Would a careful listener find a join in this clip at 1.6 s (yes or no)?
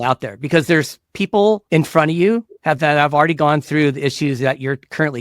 yes